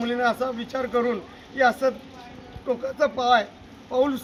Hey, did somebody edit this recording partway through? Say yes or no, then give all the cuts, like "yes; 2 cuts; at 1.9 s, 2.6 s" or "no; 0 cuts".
no; 0 cuts